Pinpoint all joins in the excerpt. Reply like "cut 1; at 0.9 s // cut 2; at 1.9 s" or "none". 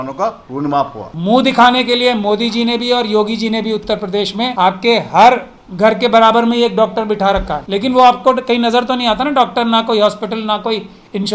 cut 1; at 1.1 s // cut 2; at 7.6 s